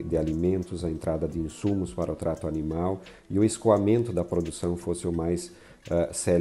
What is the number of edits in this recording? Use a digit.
0